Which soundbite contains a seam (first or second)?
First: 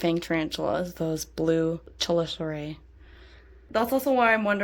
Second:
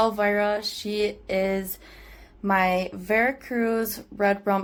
first